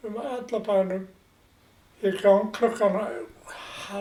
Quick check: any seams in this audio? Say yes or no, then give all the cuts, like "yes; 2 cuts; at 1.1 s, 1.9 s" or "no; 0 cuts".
no; 0 cuts